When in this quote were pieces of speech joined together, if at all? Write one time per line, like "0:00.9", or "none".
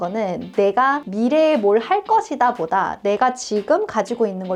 none